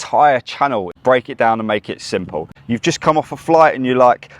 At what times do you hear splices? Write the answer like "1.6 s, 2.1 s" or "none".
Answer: 0.9 s, 2.6 s